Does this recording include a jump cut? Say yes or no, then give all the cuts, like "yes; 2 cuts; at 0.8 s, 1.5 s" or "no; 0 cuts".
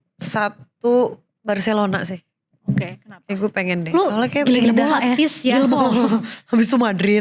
no; 0 cuts